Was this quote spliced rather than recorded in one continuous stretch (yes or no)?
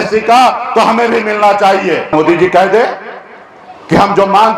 yes